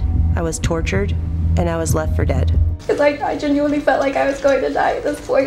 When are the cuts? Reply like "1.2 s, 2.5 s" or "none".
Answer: 2.7 s